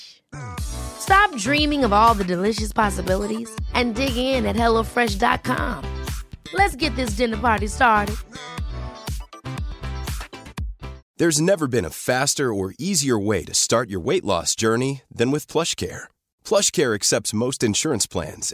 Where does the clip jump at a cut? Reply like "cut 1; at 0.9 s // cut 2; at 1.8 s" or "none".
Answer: cut 1; at 11.0 s